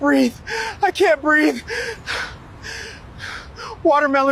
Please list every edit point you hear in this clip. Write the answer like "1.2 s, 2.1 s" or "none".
none